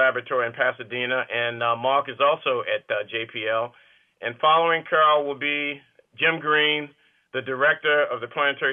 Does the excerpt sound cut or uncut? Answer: uncut